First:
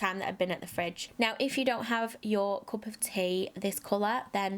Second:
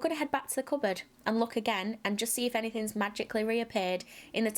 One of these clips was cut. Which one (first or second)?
first